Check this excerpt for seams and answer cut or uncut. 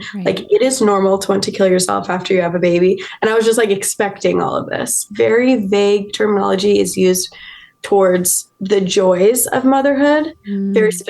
cut